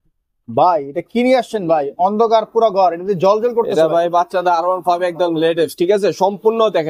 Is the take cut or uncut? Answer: uncut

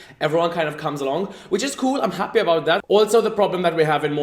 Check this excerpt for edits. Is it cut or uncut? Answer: cut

